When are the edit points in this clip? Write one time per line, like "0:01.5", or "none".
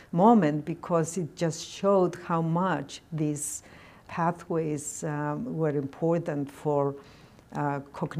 0:04.1